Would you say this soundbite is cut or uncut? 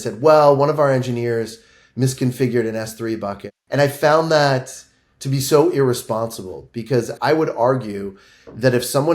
cut